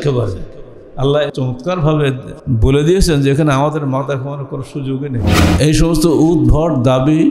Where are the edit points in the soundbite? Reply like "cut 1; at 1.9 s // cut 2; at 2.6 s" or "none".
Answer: cut 1; at 1.3 s // cut 2; at 2.3 s // cut 3; at 5.4 s